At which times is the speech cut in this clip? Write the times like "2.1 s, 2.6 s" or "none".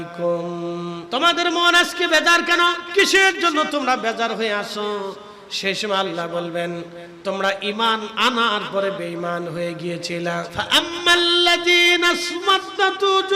1.0 s, 2.8 s, 10.5 s